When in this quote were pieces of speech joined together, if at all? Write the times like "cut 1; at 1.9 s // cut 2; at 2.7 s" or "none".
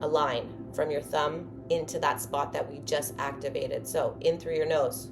cut 1; at 3.8 s